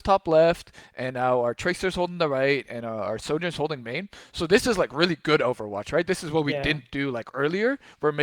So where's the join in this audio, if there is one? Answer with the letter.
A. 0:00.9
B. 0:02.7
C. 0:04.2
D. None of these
D